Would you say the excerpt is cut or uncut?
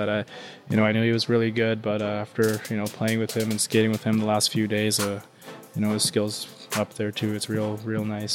uncut